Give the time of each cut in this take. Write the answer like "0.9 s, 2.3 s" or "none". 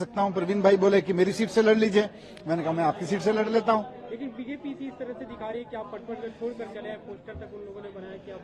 none

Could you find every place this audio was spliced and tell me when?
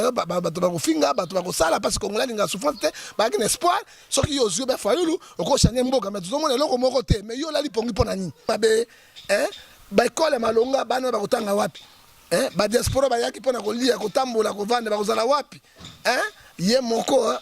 8.5 s

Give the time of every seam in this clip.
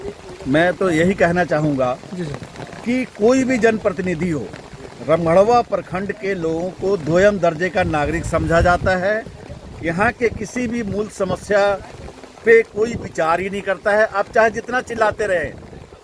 none

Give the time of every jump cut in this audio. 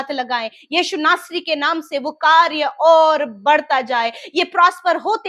none

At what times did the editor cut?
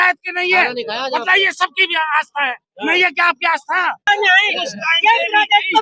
4.0 s

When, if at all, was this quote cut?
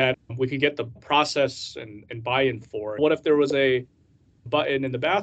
0.9 s, 3.0 s

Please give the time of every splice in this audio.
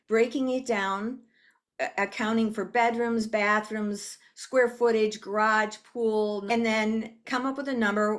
6.4 s, 7.2 s

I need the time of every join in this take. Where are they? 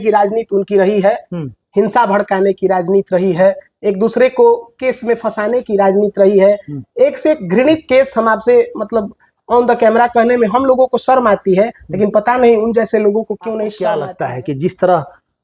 14.1 s

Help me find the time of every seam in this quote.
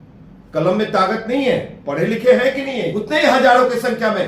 2.9 s

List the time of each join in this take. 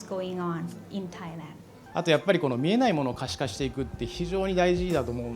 1.7 s

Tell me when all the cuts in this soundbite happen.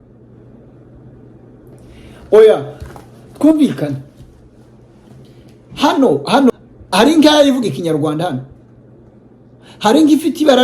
6.5 s

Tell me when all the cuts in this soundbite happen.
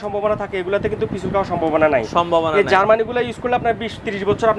none

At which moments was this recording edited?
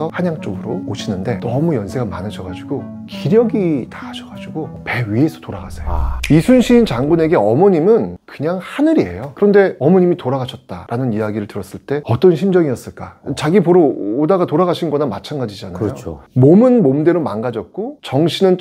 none

